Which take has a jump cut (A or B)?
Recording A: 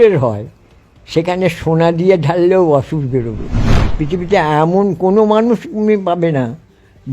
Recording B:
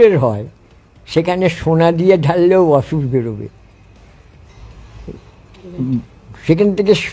A